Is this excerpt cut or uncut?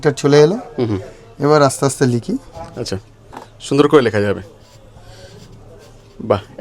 uncut